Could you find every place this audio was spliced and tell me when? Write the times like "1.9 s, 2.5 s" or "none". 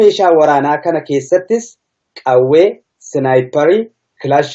none